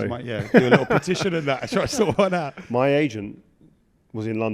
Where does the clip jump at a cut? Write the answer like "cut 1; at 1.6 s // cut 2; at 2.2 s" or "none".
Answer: cut 1; at 2.6 s